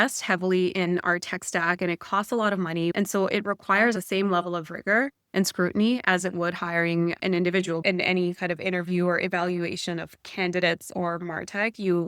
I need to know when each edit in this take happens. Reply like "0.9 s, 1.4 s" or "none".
2.9 s, 4.0 s, 7.5 s